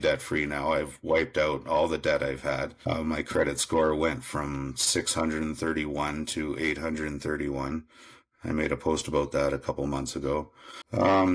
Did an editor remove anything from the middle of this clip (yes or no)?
no